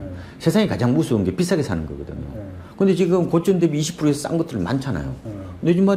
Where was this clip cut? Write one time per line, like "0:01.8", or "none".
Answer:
none

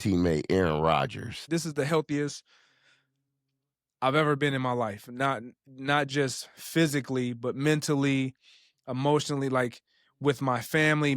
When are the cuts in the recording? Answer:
0:01.4

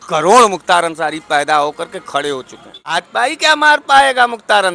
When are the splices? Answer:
0:02.9

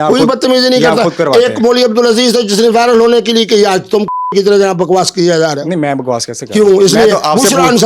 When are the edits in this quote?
none

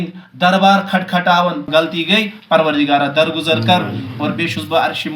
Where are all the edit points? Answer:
0:01.7

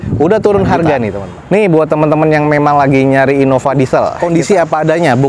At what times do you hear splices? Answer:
0:01.4
0:04.1

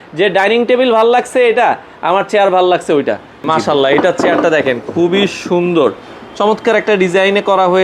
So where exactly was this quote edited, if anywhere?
0:03.4

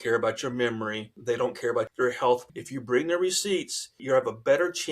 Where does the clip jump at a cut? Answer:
0:01.1
0:01.9
0:02.5
0:04.0

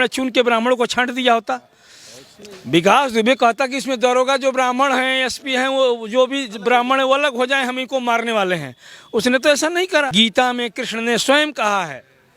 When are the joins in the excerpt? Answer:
0:10.1

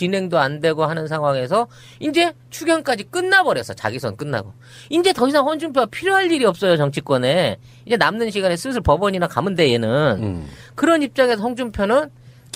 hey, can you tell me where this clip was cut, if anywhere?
0:03.0

